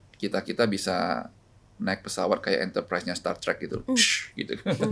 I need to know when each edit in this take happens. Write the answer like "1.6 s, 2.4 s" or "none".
none